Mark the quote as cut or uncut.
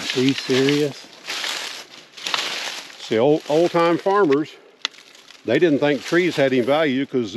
uncut